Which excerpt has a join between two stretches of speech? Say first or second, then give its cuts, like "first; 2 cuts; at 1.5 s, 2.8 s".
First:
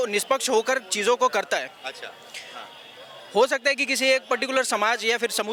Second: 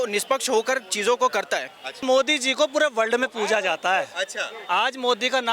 second; 1 cut; at 2.0 s